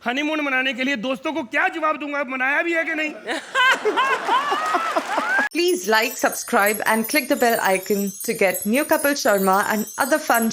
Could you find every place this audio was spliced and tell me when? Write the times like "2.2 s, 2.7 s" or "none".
5.5 s